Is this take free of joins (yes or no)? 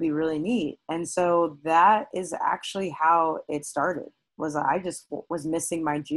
yes